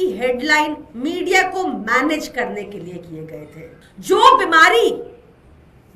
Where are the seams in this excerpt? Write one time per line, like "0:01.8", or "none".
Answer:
0:03.8